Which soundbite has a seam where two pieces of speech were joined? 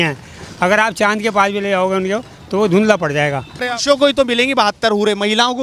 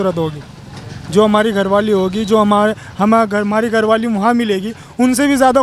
first; 1 cut; at 3.7 s

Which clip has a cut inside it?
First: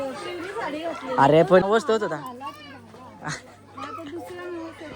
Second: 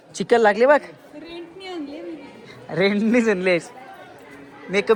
first; 1 cut; at 1.6 s

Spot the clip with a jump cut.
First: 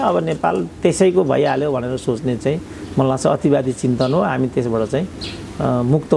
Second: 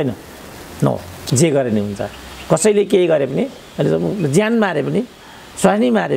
second; 1 cut; at 1.1 s

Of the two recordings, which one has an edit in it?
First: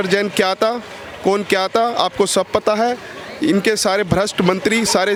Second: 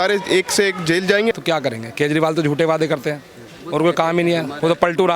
second; 1 cut; at 1.3 s

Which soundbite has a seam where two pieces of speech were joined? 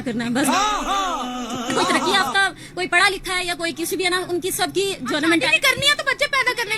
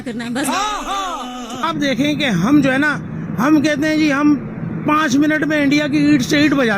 second; 1 cut; at 1.6 s

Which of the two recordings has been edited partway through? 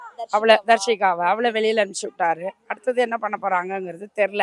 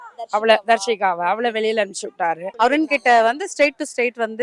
second; 1 cut; at 2.5 s

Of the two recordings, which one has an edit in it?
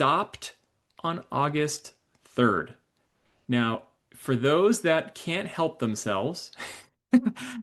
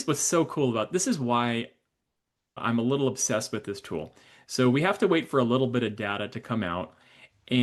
second; 1 cut; at 2.6 s

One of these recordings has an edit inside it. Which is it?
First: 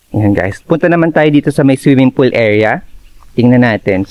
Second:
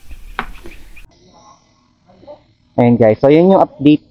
second; 1 cut; at 1.1 s

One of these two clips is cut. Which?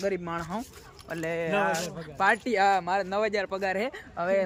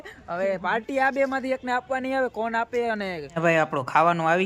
second; 1 cut; at 3.2 s

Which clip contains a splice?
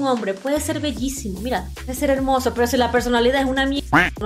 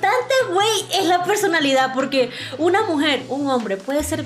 first; 1 cut; at 1.8 s

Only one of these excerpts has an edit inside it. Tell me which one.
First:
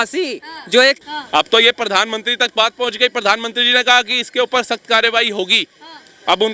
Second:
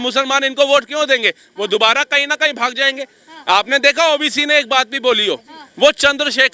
first; 1 cut; at 1.0 s

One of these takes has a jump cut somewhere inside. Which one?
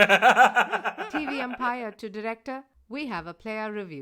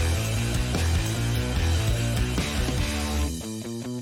first; 1 cut; at 1.1 s

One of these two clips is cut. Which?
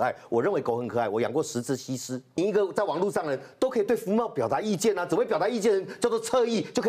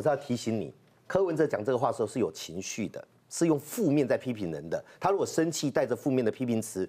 first; 1 cut; at 2.4 s

